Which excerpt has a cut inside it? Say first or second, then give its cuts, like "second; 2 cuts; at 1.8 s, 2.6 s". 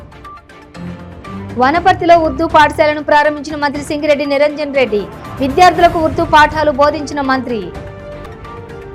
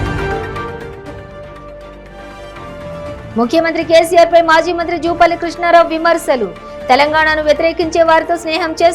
second; 1 cut; at 3.3 s